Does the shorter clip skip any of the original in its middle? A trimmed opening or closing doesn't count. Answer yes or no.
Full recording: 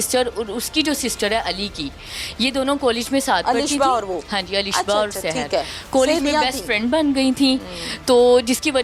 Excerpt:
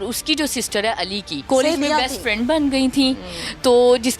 yes